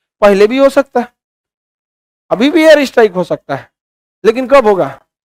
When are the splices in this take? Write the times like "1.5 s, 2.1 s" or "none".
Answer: none